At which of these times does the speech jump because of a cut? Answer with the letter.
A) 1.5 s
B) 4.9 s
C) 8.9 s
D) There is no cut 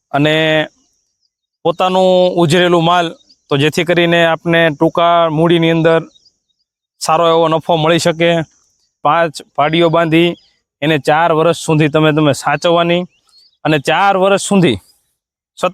C